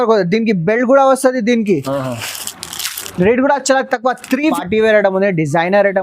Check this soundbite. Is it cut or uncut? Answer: cut